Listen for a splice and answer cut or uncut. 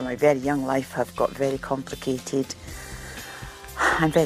uncut